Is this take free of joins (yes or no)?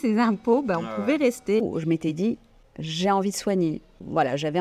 no